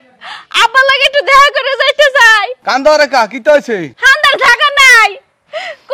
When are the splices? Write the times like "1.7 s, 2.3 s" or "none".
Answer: 2.5 s, 4.0 s